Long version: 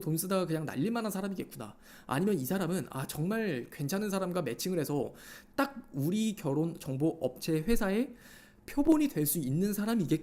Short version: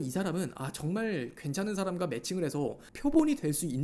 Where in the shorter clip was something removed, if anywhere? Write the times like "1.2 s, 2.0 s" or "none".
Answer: 2.9 s